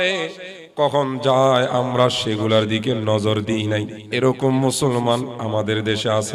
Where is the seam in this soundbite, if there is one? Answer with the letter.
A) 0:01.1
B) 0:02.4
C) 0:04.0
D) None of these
C